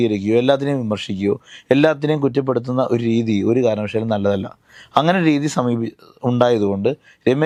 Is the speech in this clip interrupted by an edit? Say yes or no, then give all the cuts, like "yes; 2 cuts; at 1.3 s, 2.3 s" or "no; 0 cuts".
no; 0 cuts